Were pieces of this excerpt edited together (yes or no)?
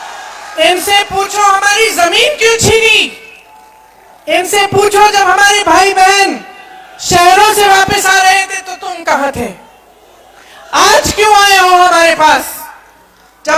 no